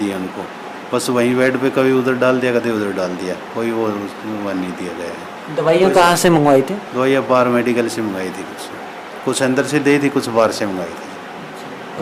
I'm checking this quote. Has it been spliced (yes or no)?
no